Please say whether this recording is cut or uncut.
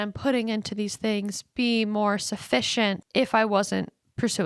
cut